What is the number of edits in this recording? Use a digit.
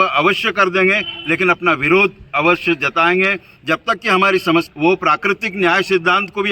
1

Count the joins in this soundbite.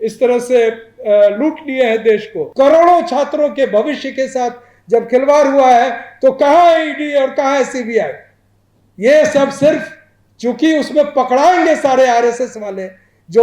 1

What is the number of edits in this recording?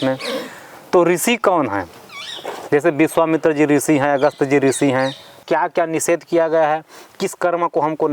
1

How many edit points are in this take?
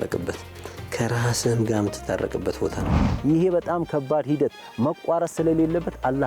1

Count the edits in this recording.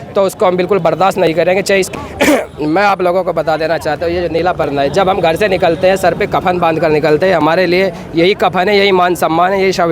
1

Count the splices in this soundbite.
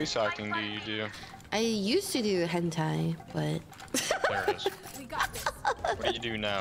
0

